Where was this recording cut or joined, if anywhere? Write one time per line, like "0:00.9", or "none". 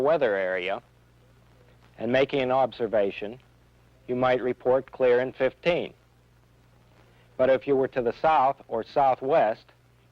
0:03.6